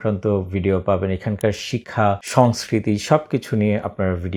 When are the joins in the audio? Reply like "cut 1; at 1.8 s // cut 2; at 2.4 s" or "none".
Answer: none